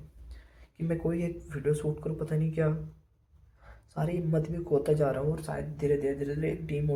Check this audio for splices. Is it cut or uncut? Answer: uncut